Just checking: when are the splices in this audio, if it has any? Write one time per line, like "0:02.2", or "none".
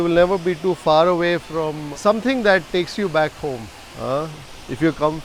0:01.9